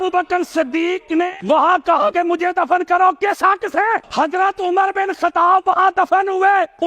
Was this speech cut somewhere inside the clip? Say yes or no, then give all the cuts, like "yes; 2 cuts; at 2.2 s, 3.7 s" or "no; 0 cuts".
no; 0 cuts